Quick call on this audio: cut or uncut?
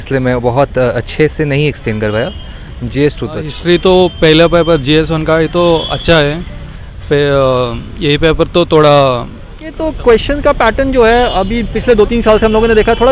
cut